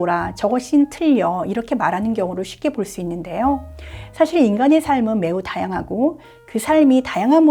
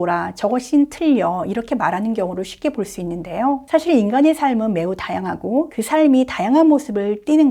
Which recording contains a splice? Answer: second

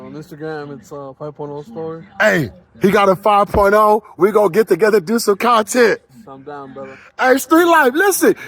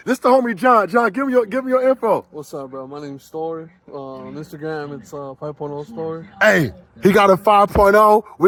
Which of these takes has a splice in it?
first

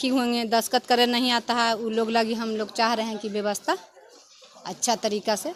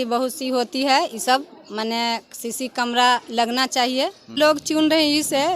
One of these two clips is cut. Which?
second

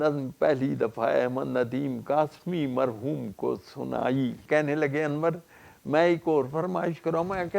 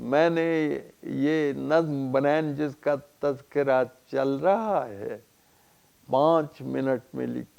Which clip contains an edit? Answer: first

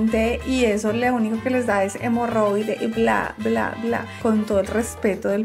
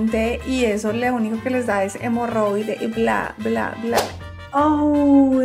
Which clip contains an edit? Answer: second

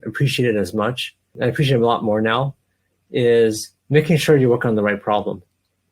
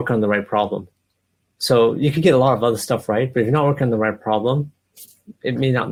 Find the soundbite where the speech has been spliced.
first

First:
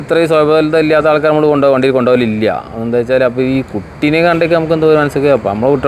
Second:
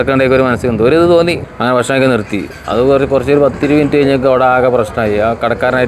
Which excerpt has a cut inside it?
second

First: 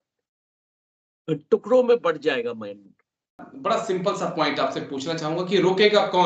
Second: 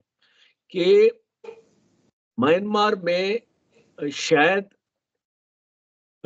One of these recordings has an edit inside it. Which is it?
first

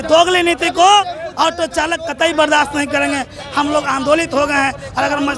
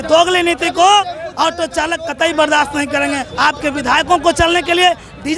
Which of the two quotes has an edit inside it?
second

